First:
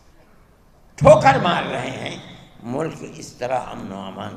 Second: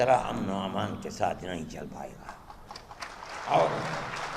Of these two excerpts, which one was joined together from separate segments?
second; 1 cut; at 3.3 s

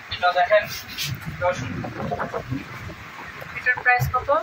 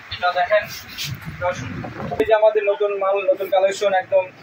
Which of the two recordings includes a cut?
second; 1 cut; at 2.2 s

